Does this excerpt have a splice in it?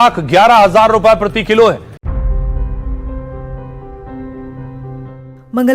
yes; 1 cut; at 2.0 s

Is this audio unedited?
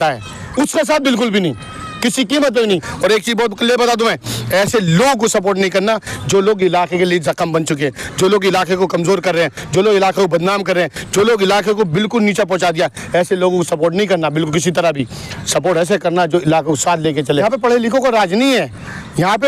no; 2 cuts; at 2.9 s, 17.4 s

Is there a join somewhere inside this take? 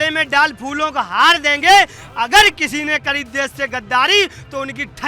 no; 0 cuts

